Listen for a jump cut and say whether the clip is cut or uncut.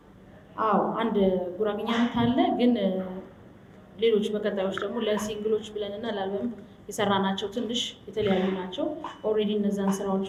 uncut